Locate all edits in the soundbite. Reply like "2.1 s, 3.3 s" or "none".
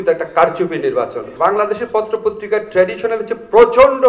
1.3 s